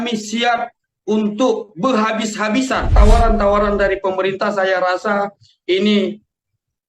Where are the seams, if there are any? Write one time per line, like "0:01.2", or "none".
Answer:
0:02.9